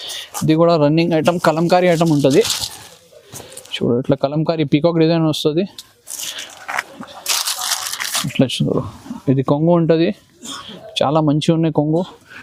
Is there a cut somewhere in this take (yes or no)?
no